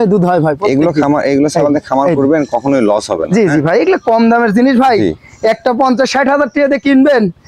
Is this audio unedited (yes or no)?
yes